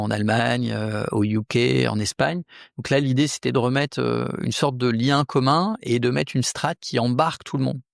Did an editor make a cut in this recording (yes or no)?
no